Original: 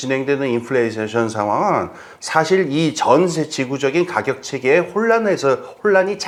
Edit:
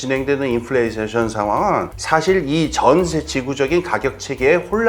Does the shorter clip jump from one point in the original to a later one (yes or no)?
yes